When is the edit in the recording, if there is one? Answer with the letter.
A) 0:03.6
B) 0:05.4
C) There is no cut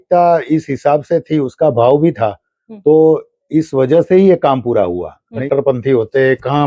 B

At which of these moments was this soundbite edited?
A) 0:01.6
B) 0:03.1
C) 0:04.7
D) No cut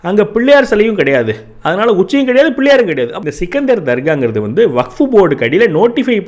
B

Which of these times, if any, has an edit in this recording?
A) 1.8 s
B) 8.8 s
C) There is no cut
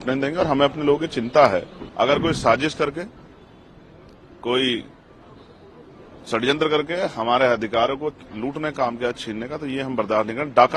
A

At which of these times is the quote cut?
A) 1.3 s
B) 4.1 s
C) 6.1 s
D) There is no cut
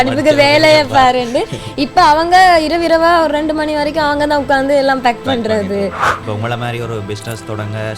C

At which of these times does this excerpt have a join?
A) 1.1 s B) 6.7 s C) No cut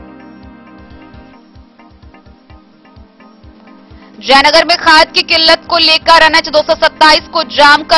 A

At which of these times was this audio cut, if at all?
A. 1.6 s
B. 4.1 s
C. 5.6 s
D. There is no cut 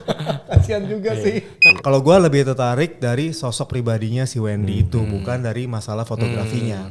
A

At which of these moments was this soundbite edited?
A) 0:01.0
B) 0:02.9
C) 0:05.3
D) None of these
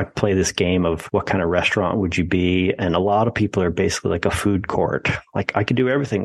A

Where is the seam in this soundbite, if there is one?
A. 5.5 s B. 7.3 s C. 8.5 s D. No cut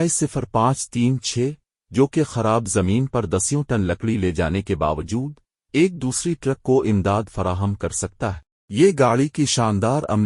C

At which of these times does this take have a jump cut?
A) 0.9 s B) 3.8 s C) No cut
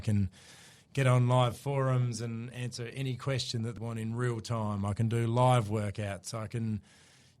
B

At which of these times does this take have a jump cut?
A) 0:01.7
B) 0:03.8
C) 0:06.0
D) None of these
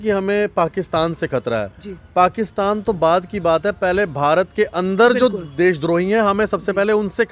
D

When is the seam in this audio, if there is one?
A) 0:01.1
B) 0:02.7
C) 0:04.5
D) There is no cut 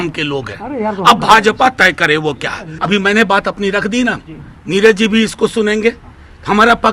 B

